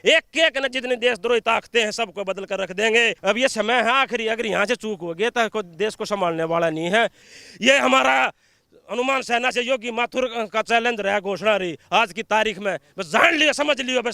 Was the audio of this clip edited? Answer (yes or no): yes